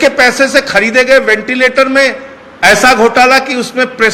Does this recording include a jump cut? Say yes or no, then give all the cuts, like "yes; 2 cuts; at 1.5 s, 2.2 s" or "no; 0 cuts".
no; 0 cuts